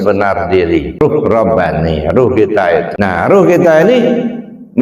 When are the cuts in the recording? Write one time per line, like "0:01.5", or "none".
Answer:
0:01.0
0:02.9